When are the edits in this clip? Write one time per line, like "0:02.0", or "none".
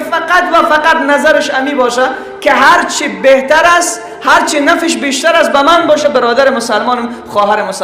none